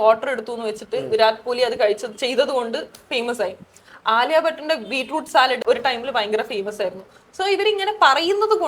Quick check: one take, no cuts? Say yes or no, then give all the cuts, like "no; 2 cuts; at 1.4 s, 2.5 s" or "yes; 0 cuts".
no; 1 cut; at 5.6 s